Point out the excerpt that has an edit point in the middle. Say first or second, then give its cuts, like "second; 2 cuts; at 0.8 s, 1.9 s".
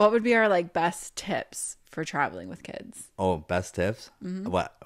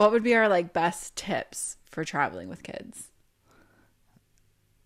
first; 1 cut; at 3.1 s